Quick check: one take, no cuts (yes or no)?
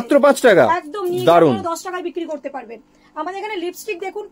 yes